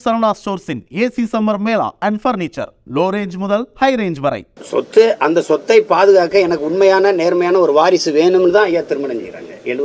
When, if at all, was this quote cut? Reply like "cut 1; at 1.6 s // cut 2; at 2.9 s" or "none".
cut 1; at 4.5 s